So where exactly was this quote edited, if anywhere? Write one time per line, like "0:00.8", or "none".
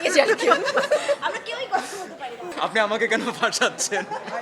0:02.5